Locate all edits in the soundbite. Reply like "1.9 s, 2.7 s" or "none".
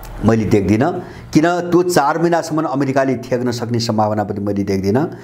none

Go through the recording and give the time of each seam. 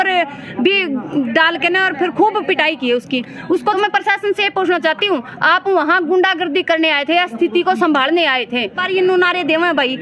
3.8 s, 8.8 s

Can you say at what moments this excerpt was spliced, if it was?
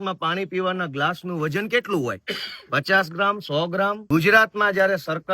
4.0 s

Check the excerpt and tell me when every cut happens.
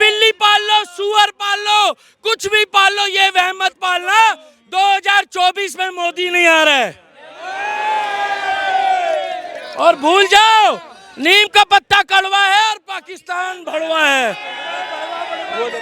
none

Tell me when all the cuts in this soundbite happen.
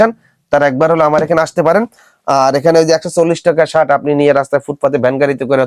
none

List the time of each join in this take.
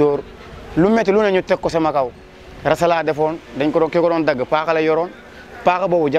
none

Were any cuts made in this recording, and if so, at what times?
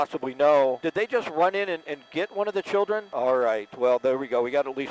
0.8 s, 3.1 s

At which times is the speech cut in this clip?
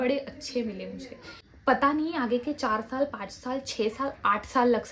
1.5 s

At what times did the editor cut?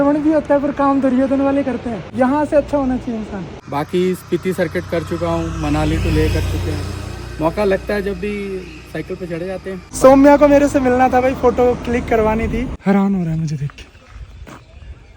2.1 s, 3.6 s, 9.9 s, 12.7 s

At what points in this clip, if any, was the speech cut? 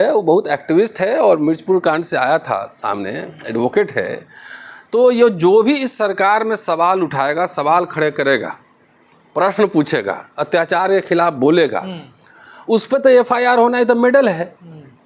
none

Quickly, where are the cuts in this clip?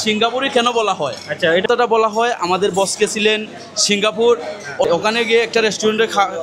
1.6 s, 5.0 s

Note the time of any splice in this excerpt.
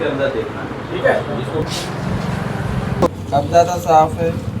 1.6 s, 3.1 s

